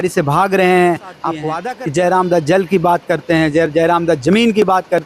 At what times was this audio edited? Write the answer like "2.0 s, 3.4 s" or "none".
1.5 s